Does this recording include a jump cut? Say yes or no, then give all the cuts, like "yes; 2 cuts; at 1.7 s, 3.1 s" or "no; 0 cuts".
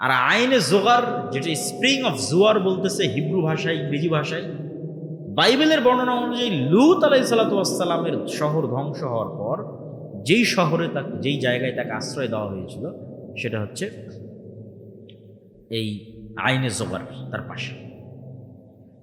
no; 0 cuts